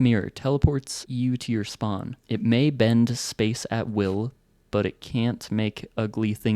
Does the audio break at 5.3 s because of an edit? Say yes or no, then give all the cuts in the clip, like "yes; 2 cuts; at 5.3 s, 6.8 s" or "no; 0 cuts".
no; 2 cuts; at 1.0 s, 2.1 s